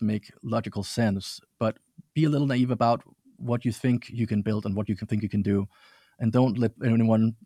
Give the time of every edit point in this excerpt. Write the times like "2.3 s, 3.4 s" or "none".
none